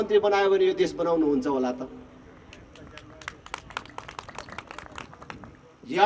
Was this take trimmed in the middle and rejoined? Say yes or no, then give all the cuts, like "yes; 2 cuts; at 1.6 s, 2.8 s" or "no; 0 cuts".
no; 0 cuts